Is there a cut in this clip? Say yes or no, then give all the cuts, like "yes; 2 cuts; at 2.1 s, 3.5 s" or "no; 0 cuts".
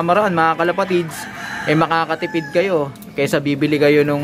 no; 0 cuts